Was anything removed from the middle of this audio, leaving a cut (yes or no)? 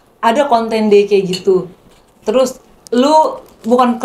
no